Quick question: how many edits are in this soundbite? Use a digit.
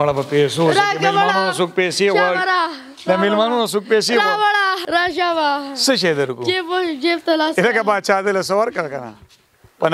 1